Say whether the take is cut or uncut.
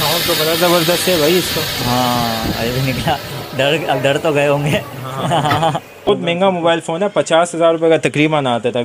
cut